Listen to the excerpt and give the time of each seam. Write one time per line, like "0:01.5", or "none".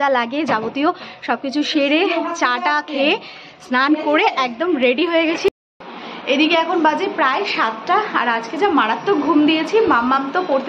0:05.5